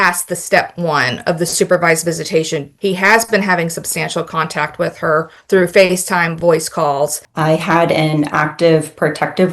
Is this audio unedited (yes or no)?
no